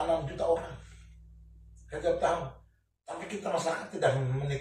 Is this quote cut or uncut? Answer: uncut